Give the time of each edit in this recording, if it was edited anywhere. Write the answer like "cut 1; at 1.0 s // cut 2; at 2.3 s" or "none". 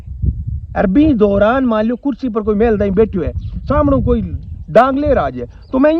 none